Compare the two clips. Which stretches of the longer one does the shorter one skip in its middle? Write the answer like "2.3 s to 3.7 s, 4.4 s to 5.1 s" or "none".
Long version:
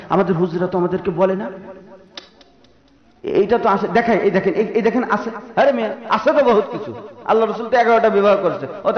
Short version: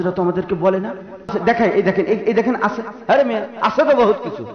1.9 s to 3.8 s

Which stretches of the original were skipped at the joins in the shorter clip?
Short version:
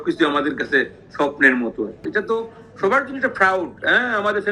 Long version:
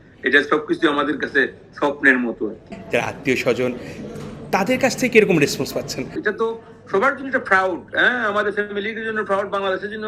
2.6 s to 6.1 s

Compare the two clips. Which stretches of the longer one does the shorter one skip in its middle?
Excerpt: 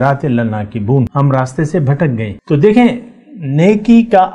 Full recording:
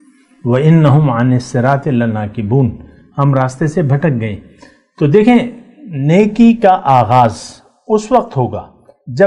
2.7 s to 3.1 s, 4.4 s to 4.8 s

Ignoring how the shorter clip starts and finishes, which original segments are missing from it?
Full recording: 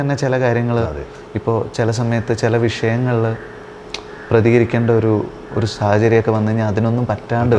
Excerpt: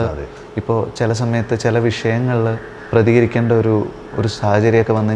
3.5 s to 4.1 s

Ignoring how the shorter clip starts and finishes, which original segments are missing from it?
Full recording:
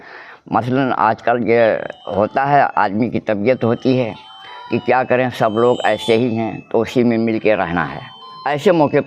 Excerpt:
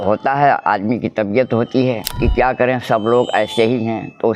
4.2 s to 4.6 s

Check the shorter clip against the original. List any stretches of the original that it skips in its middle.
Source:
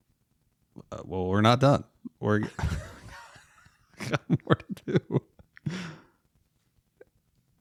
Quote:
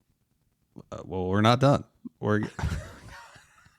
none

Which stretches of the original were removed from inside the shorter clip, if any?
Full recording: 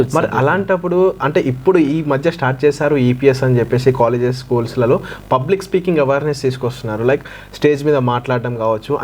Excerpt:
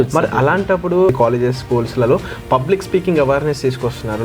1.2 s to 4.0 s

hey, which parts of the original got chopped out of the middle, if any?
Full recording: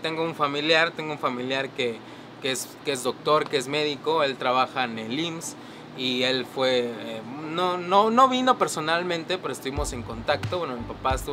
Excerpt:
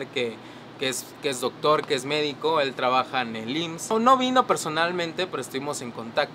5.5 s to 8.0 s

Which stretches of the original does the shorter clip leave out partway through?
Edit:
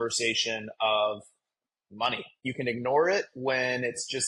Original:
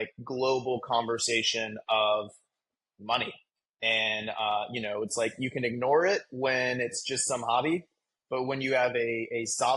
3.5 s to 5.4 s

